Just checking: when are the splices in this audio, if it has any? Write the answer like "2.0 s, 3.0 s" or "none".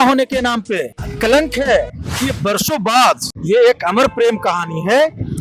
1.0 s, 2.1 s, 3.3 s